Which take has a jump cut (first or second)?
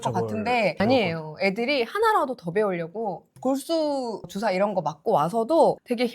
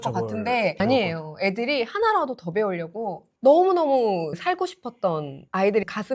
second